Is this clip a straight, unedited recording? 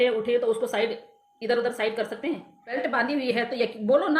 no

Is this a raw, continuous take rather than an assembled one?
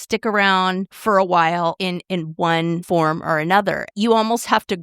no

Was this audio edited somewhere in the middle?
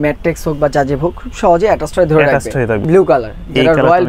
yes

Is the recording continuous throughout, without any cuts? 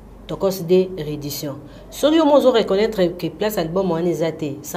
yes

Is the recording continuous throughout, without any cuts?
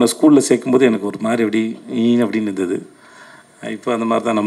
yes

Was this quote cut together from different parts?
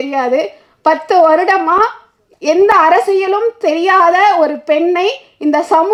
no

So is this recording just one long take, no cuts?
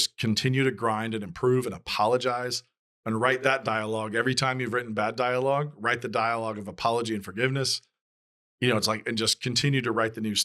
yes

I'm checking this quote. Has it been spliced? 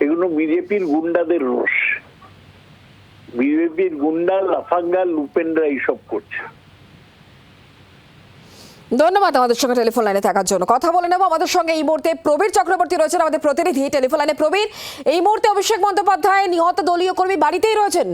no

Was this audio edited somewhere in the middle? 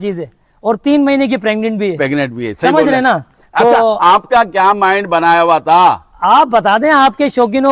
no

